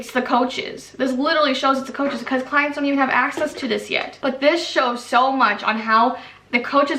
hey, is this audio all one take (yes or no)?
no